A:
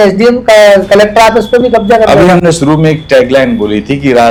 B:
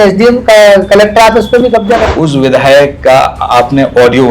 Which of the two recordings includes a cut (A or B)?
B